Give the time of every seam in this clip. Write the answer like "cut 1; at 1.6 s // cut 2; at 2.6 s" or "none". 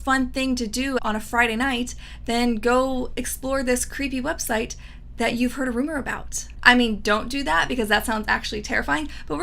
cut 1; at 1.0 s